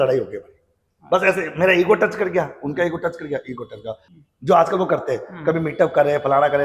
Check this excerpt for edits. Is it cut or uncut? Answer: cut